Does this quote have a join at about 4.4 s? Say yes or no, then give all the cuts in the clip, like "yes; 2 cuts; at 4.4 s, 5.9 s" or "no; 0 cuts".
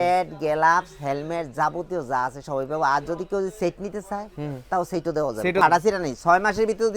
no; 1 cut; at 5.6 s